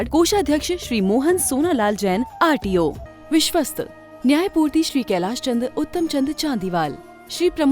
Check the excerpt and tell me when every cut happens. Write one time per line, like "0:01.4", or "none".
0:03.1